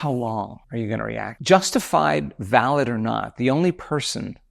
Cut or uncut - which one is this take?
cut